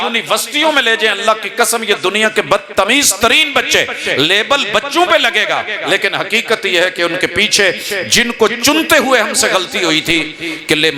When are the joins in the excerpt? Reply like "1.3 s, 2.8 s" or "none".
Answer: none